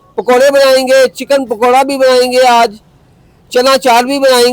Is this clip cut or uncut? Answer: uncut